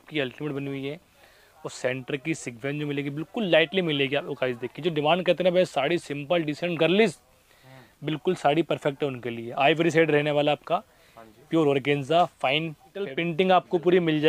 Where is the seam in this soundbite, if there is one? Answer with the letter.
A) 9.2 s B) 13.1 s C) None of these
B